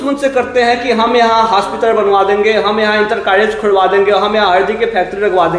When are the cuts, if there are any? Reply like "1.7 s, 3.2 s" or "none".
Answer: none